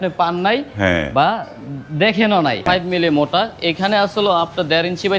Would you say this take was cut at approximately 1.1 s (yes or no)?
no